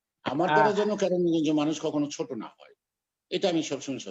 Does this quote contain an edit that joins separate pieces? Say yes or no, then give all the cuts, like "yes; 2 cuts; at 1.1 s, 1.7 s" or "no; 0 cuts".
no; 0 cuts